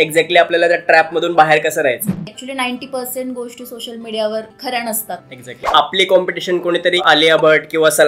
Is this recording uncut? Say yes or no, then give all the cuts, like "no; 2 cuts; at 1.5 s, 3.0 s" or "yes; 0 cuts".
no; 4 cuts; at 2.3 s, 4.5 s, 5.7 s, 7.0 s